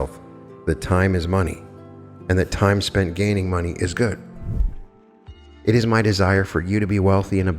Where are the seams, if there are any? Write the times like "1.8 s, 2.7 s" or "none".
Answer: 4.6 s